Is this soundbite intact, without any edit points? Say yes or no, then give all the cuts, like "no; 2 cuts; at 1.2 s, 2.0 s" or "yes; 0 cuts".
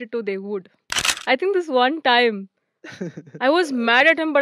no; 1 cut; at 1.1 s